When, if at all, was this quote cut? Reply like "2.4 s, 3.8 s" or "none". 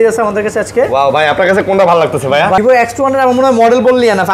2.6 s